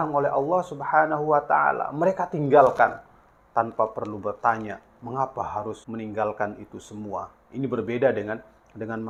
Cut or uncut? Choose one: uncut